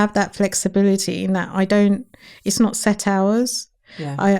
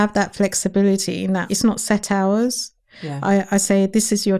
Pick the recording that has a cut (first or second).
second